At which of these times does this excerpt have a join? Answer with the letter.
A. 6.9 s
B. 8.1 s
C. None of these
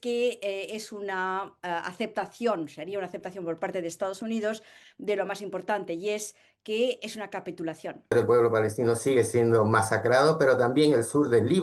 B